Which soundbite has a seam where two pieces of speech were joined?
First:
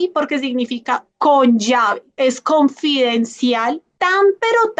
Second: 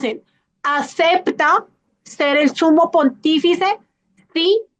first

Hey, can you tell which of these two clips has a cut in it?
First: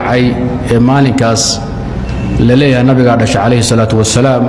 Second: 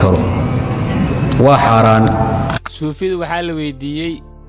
second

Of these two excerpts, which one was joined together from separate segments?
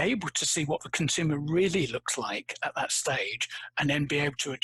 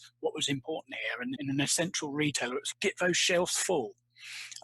second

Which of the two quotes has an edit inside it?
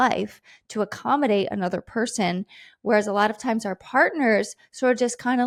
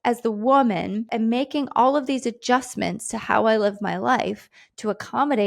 second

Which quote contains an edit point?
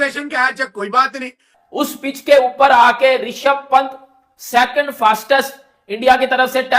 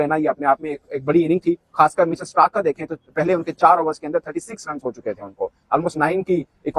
first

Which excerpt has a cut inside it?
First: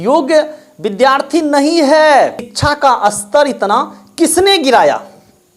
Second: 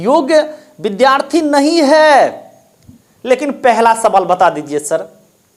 first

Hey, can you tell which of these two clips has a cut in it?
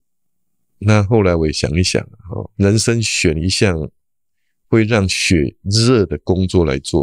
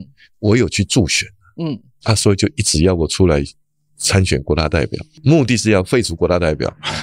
second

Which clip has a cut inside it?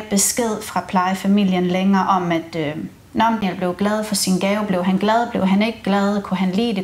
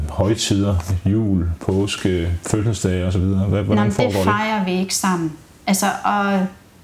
first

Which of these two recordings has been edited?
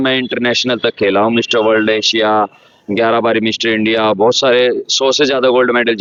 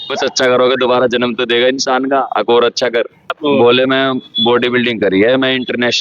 second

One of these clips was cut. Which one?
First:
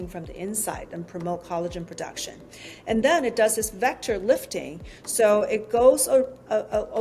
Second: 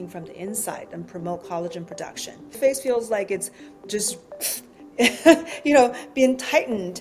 second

